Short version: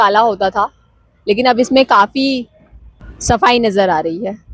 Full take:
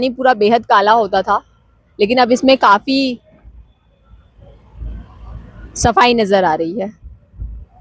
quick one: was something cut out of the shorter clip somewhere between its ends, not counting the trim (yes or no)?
yes